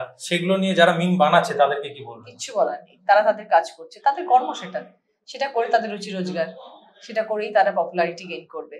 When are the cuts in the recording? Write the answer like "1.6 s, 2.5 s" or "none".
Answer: none

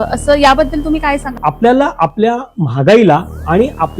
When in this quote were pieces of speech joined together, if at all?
1.3 s

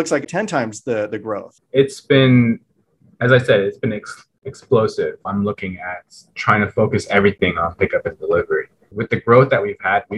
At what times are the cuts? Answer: 5.3 s

